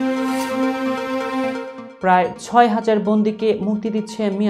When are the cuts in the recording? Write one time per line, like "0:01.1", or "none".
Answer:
0:01.7